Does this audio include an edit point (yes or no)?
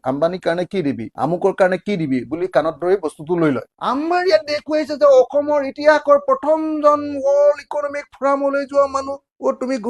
yes